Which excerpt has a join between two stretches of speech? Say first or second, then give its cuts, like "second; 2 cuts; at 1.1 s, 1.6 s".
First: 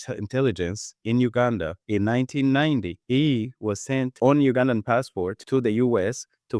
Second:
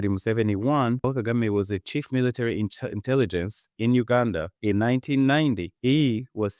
second; 1 cut; at 1.0 s